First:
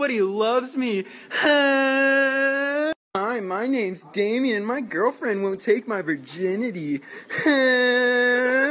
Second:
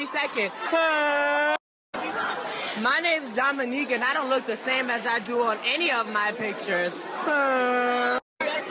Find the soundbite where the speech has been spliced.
first; 1 cut; at 6.5 s

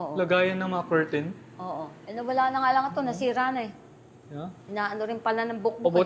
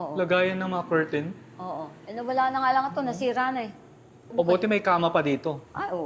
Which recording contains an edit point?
second; 1 cut; at 4.3 s

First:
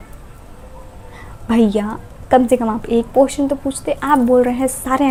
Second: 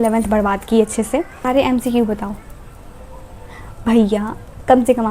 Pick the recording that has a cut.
second; 1 cut; at 1.3 s

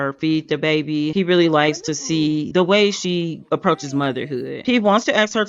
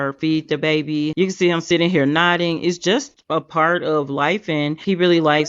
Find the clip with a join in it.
first; 2 cuts; at 1.1 s, 4.6 s

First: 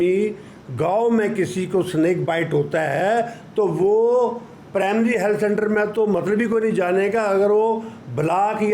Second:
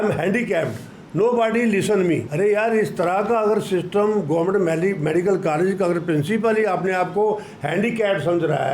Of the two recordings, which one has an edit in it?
second; 1 cut; at 2.3 s

